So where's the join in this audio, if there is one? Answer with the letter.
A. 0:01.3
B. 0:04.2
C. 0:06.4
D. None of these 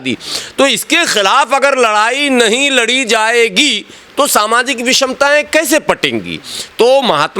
D